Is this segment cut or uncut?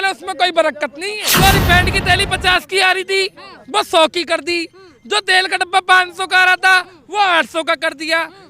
cut